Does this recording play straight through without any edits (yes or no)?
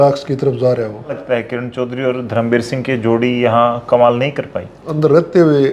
no